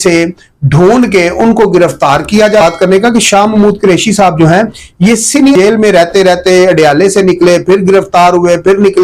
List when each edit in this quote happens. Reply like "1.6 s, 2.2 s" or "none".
2.6 s, 5.5 s